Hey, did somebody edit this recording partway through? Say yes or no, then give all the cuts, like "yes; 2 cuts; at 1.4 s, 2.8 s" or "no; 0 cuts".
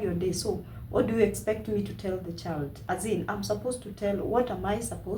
no; 0 cuts